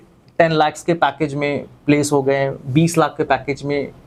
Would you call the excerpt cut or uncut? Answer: uncut